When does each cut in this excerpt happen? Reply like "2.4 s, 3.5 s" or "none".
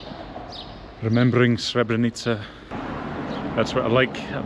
2.7 s